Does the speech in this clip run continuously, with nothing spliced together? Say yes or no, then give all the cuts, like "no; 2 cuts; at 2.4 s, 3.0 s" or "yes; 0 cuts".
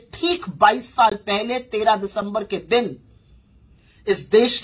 yes; 0 cuts